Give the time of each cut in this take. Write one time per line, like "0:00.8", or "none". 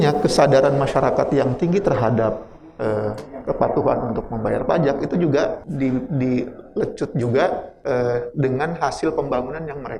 0:05.6
0:07.7

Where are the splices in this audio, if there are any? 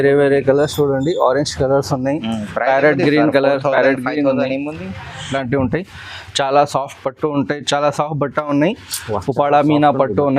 0:05.3

